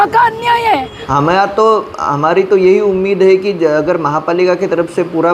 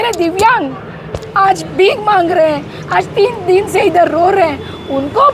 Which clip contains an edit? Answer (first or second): first